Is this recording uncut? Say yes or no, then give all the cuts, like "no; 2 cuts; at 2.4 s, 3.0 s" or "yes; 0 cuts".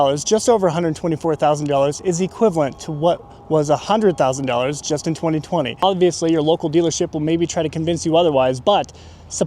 no; 1 cut; at 5.8 s